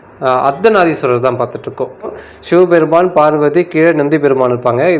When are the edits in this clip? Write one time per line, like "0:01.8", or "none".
0:02.1